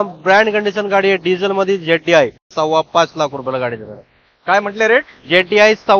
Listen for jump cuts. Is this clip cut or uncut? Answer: cut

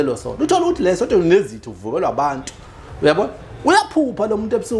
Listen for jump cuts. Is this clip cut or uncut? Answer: uncut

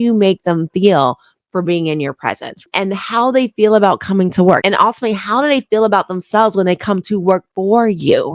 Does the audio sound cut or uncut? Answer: cut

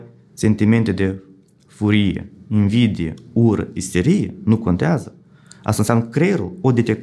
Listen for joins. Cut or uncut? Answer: uncut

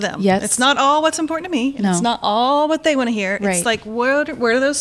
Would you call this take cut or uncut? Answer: uncut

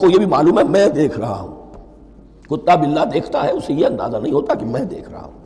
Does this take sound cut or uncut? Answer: uncut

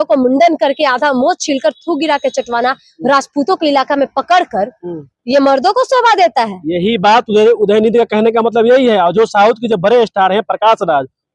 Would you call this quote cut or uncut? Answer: uncut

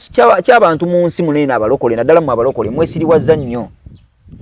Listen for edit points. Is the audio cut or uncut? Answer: uncut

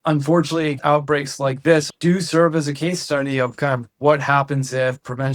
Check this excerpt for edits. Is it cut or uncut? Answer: cut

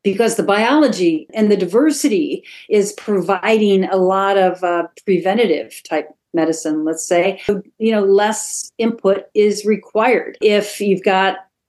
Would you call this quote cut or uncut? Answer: cut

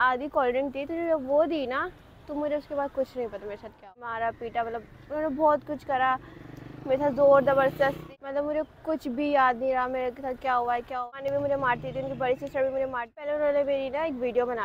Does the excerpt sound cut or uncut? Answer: cut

